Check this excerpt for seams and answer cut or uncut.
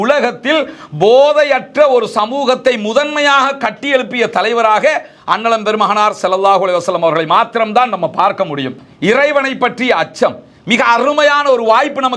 cut